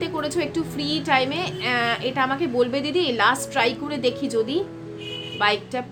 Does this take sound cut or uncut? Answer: uncut